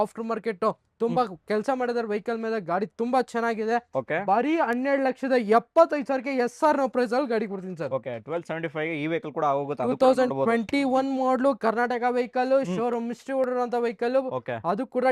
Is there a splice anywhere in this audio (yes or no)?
no